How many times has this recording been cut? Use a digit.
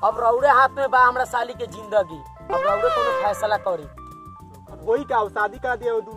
1